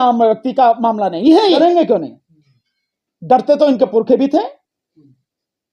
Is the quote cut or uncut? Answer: cut